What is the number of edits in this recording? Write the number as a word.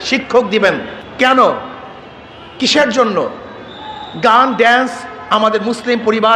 one